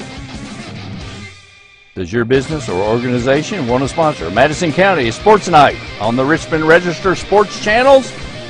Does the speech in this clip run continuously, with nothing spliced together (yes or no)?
yes